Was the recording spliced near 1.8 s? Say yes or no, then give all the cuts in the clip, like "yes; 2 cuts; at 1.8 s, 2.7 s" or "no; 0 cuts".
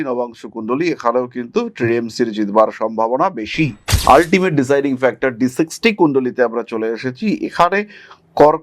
no; 1 cut; at 3.8 s